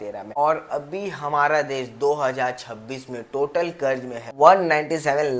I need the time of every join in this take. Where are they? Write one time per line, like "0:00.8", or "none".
none